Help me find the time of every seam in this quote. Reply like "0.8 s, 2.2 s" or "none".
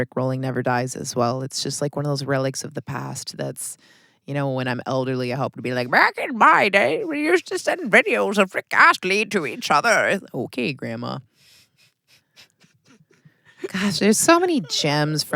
none